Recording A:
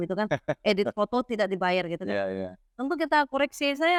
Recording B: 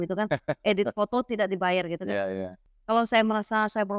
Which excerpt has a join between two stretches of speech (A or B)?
B